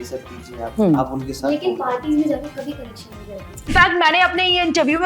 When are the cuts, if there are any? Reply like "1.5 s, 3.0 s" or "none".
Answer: 3.7 s